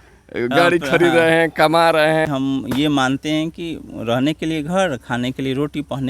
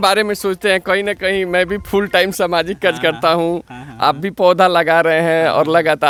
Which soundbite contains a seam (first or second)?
first